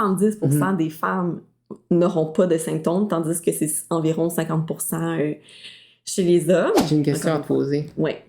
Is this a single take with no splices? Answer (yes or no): no